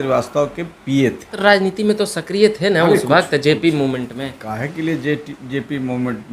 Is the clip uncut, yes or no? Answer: no